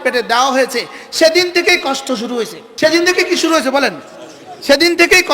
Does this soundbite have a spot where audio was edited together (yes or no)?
yes